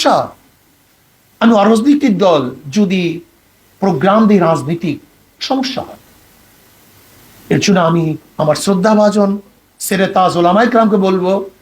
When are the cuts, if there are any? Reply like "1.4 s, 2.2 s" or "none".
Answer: none